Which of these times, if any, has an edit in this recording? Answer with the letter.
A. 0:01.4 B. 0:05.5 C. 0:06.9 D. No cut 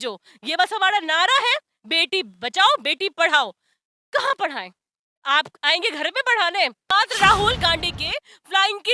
C